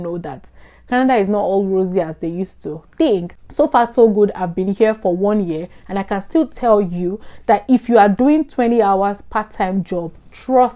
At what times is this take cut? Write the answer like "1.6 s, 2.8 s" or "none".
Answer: 3.4 s

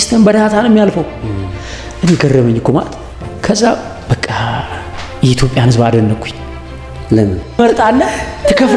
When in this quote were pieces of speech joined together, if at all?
7.6 s

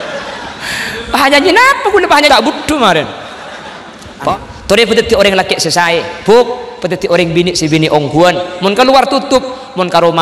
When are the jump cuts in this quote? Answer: 4.3 s

